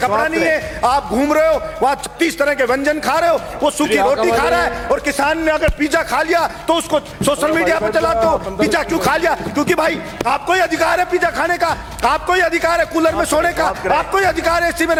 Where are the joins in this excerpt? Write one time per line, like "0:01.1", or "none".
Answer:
none